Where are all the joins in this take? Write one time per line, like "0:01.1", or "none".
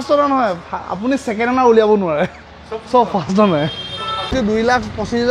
0:04.3